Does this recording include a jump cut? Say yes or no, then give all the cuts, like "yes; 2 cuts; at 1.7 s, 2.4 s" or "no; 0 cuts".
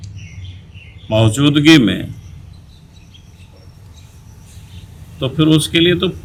no; 0 cuts